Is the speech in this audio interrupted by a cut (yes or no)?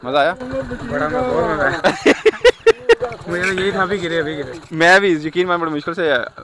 no